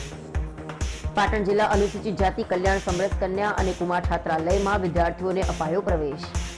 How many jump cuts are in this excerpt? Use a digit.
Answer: 0